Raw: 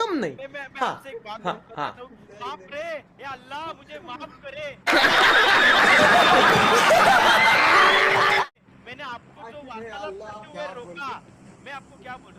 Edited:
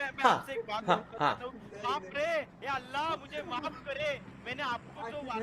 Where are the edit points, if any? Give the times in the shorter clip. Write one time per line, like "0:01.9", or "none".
0:04.2